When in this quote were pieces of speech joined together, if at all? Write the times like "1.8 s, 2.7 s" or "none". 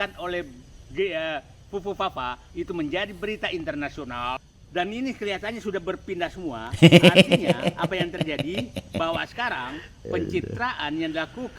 4.4 s

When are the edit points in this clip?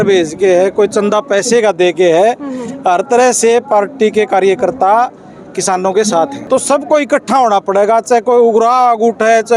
6.4 s

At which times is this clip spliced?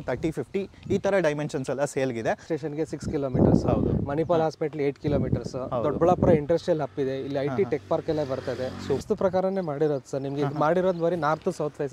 2.5 s, 9.0 s

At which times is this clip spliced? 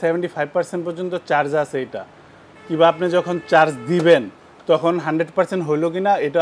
none

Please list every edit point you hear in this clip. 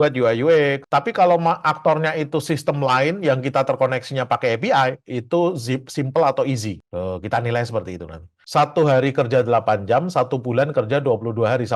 0.8 s, 6.8 s, 8.3 s

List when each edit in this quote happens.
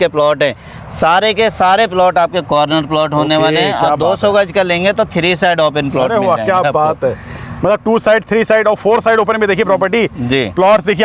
none

